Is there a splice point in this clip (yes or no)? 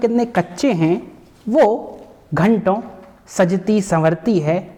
no